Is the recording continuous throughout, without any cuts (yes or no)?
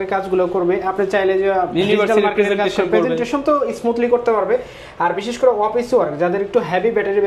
yes